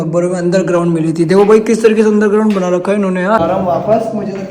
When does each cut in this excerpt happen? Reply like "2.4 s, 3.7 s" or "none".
3.4 s